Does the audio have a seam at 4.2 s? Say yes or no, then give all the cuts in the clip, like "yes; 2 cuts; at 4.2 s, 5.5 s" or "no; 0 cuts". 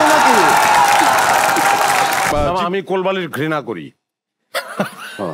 no; 1 cut; at 2.3 s